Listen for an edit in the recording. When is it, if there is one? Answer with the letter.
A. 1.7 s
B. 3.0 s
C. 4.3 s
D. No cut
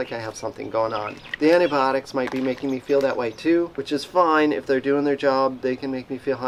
D